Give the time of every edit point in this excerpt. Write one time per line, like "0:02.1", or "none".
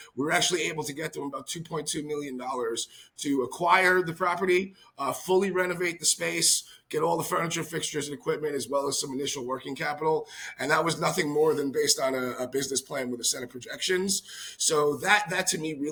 none